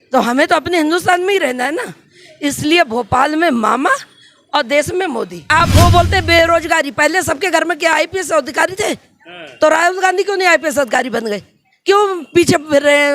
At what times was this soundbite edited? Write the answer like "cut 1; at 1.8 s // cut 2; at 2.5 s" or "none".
cut 1; at 5.5 s